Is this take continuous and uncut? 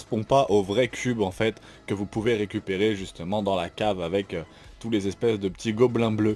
yes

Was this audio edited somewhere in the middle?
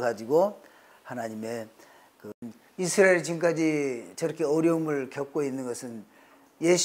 yes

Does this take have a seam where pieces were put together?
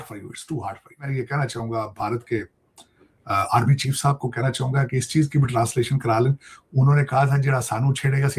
yes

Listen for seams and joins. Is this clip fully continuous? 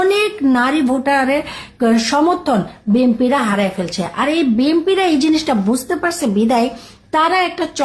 yes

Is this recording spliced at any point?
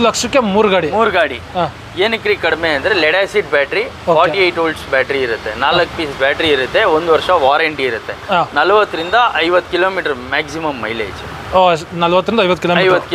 no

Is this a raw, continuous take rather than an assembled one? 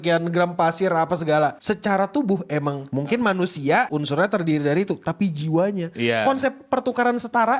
no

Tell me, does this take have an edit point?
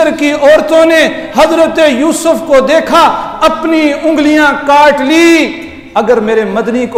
no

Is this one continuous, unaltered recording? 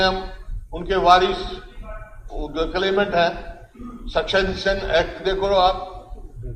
yes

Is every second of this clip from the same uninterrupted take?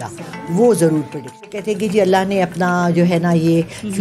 no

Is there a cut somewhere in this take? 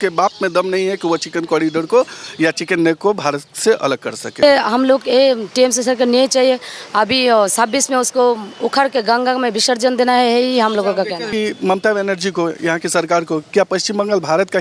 yes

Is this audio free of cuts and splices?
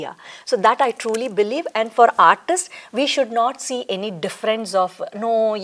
yes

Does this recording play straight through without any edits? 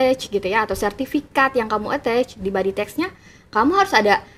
yes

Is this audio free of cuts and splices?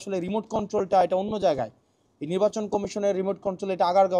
yes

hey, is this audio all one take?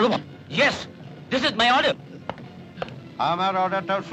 yes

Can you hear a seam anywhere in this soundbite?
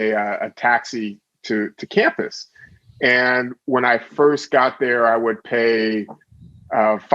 no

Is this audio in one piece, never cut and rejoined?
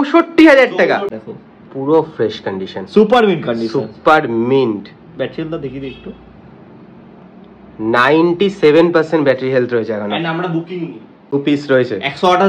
no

